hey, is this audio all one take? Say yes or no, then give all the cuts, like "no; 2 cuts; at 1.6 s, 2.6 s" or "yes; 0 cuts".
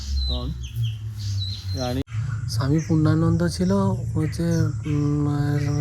no; 1 cut; at 2.0 s